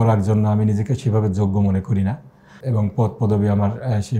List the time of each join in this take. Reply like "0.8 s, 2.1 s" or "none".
2.6 s